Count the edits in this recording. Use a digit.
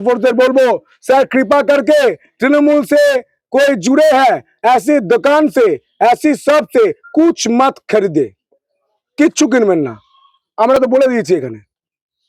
0